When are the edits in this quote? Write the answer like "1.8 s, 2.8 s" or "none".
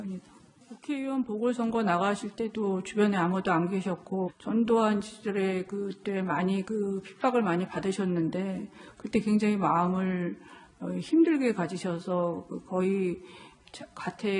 3.4 s